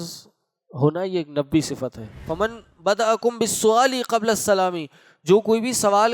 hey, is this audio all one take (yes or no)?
no